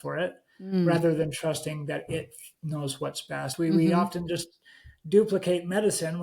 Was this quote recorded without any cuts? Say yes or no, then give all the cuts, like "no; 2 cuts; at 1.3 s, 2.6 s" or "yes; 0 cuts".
no; 1 cut; at 3.5 s